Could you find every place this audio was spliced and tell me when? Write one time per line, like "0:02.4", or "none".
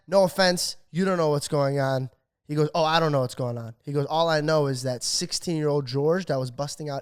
none